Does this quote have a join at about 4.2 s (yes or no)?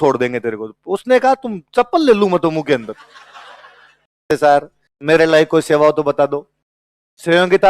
yes